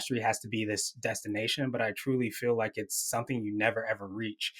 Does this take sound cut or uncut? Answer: uncut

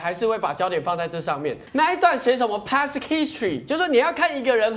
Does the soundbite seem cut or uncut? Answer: cut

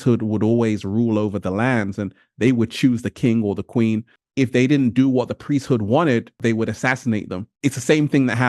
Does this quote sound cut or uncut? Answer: cut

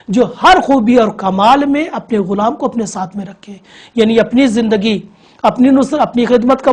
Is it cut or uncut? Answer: uncut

